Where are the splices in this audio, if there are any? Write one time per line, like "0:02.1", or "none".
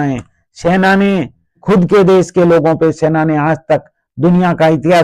0:01.6